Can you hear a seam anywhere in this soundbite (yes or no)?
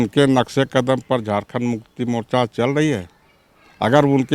no